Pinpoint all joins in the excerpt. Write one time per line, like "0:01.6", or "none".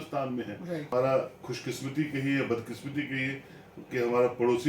0:00.9